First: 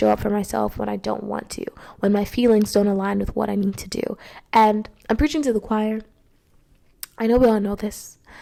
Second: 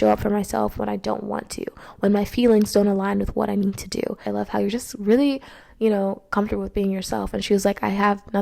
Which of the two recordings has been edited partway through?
second; 1 cut; at 4.3 s

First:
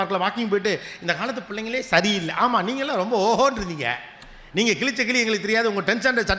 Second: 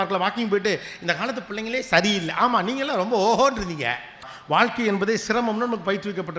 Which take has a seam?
second; 1 cut; at 4.3 s

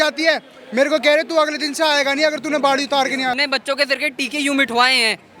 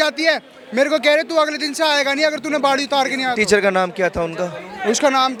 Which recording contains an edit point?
first; 1 cut; at 3.3 s

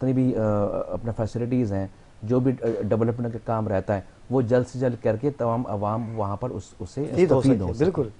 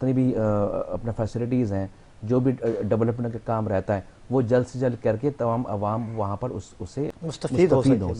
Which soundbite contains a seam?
first; 1 cut; at 7.1 s

